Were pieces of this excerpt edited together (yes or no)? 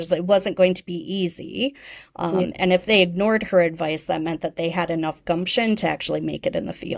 no